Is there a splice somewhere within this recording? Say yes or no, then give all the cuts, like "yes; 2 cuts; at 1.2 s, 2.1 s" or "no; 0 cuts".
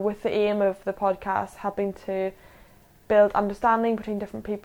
no; 0 cuts